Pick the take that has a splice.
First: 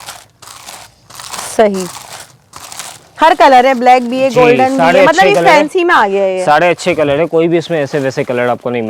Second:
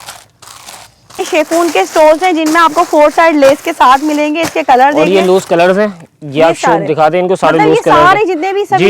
second; 1 cut; at 1.2 s

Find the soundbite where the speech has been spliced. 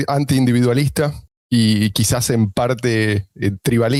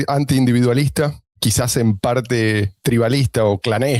second; 2 cuts; at 1.4 s, 2.8 s

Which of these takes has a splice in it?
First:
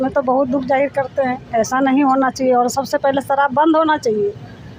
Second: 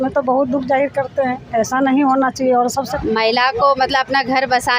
second; 1 cut; at 2.9 s

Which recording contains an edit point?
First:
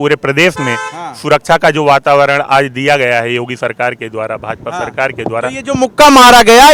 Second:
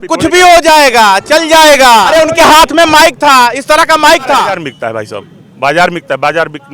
second; 2 cuts; at 2.1 s, 4.6 s

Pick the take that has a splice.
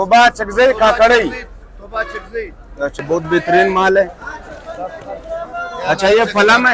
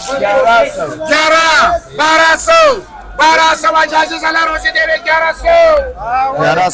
first; 1 cut; at 3.0 s

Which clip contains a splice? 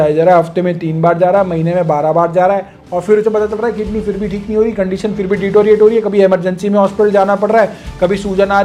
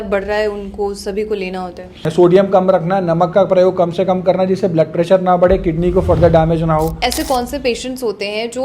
second; 2 cuts; at 2.1 s, 7.0 s

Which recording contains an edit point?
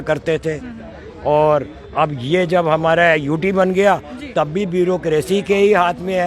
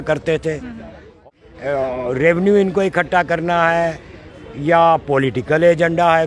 second; 1 cut; at 1.3 s

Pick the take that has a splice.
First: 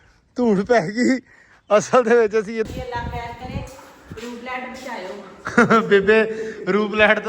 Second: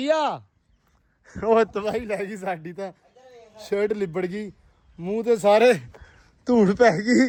first; 1 cut; at 2.7 s

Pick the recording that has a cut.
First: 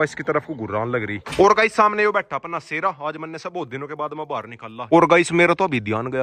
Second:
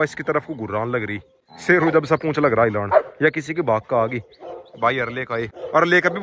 first; 2 cuts; at 1.2 s, 4.8 s

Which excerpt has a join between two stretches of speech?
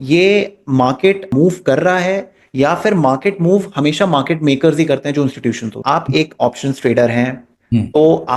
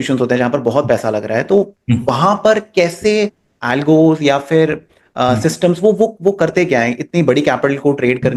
first; 2 cuts; at 1.3 s, 5.8 s

